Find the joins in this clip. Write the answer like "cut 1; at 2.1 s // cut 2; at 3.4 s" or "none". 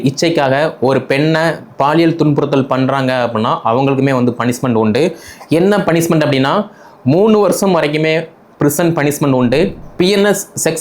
cut 1; at 9.8 s